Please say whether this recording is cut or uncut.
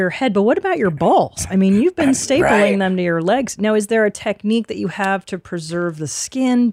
uncut